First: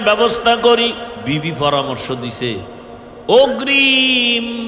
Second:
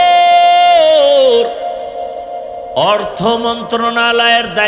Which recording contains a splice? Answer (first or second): first